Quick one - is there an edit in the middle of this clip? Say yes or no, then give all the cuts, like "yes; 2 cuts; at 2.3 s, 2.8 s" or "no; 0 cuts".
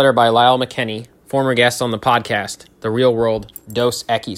no; 0 cuts